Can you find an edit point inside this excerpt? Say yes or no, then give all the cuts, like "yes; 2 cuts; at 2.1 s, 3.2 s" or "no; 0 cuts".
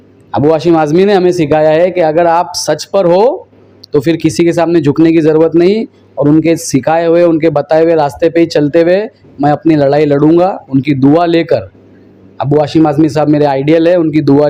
no; 0 cuts